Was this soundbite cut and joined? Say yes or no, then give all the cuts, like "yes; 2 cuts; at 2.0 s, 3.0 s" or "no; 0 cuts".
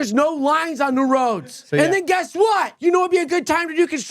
yes; 2 cuts; at 1.5 s, 2.7 s